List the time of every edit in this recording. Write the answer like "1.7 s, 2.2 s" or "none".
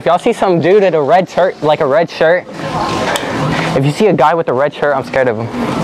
none